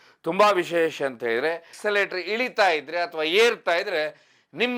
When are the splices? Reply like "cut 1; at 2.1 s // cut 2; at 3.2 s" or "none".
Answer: cut 1; at 1.7 s